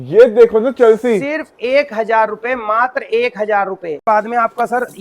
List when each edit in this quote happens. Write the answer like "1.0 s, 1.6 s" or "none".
4.0 s

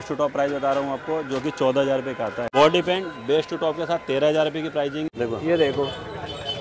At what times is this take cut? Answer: 2.5 s, 5.1 s

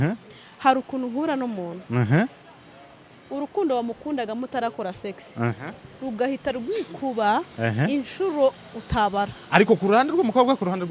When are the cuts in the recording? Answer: none

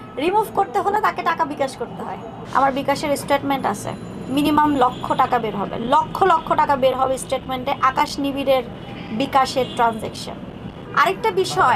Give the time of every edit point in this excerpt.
2.3 s, 10.9 s

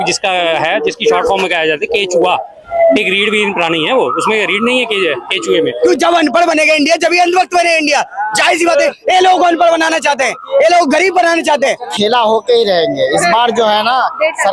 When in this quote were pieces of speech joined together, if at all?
5.7 s, 11.9 s

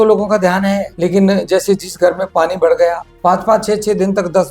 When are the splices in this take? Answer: 0.9 s, 3.1 s

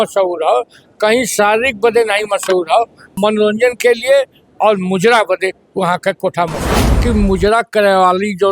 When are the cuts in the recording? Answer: 3.1 s, 7.0 s

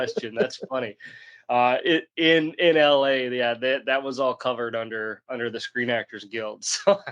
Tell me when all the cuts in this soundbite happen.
none

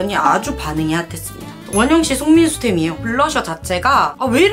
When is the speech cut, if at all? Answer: 1.5 s, 3.0 s

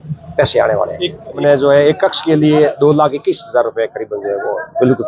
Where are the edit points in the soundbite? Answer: 1.4 s

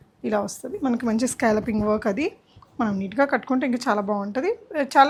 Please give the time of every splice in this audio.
none

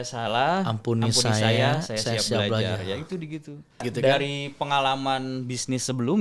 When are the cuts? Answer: 3.9 s

